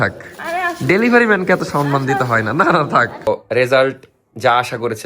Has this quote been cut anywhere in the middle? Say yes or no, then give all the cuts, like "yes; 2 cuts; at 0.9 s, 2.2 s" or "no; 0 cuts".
yes; 1 cut; at 3.3 s